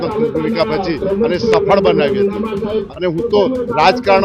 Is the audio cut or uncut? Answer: cut